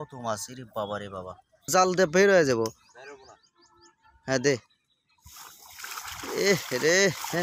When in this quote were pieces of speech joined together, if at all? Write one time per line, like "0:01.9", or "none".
0:01.6